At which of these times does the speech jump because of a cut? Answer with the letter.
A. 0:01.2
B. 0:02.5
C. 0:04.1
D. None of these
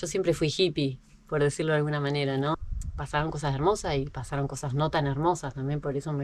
B